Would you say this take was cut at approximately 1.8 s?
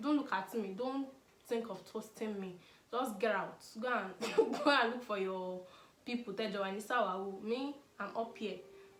no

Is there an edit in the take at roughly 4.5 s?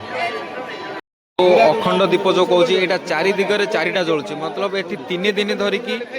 no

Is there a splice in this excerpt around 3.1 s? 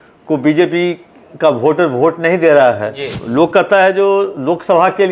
yes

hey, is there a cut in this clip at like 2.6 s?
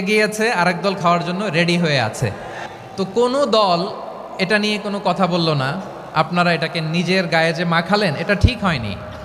yes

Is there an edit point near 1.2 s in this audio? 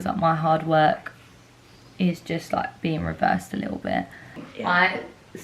no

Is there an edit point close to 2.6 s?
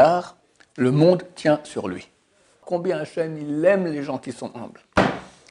yes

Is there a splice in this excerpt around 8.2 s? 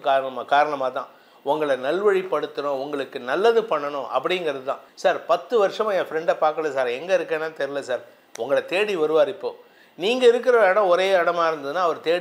no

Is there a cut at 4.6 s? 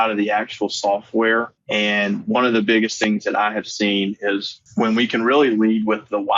yes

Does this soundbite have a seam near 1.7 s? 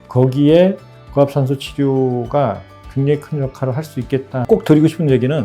no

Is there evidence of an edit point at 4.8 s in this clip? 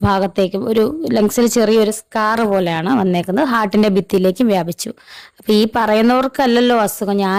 no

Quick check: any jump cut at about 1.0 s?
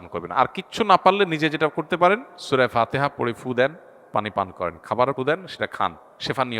no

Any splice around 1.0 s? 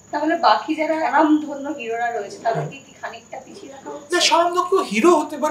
yes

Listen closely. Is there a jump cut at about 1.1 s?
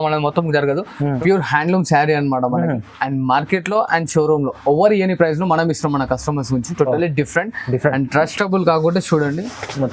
yes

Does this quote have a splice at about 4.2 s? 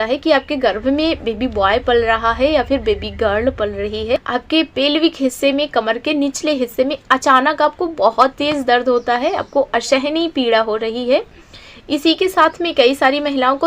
yes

